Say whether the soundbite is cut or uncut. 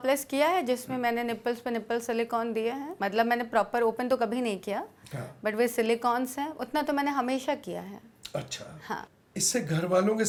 uncut